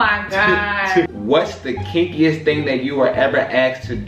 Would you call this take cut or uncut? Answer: cut